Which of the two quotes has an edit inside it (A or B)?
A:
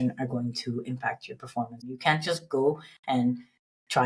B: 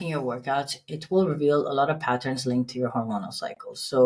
A